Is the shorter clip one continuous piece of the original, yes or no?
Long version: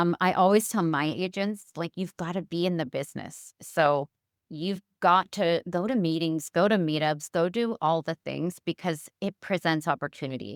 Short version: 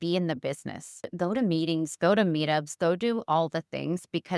no